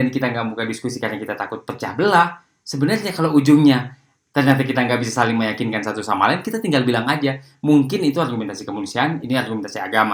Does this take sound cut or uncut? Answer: uncut